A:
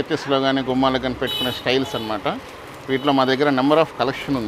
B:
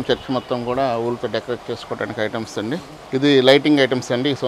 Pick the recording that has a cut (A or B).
B